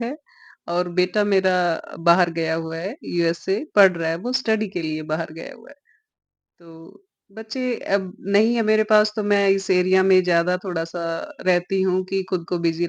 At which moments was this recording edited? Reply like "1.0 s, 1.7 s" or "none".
none

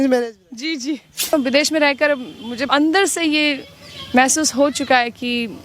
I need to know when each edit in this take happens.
1.3 s, 2.7 s

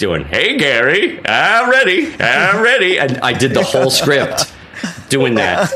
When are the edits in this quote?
none

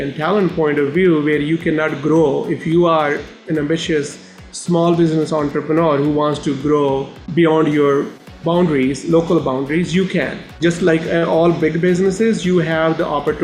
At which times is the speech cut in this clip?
7.2 s, 10.4 s

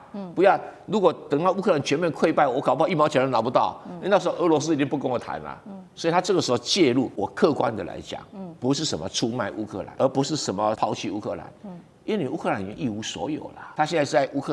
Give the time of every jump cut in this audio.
7.1 s, 9.9 s, 10.8 s, 13.6 s

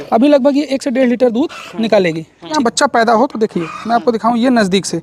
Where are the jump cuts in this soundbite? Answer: 2.6 s

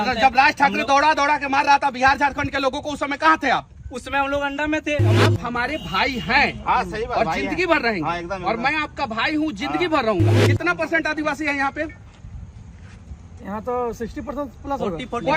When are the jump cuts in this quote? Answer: 5.1 s, 10.4 s

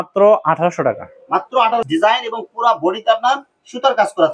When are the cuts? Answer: 1.9 s

